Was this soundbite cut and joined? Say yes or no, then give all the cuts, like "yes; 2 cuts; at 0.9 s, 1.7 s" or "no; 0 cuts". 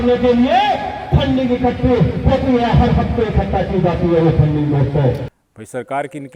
no; 0 cuts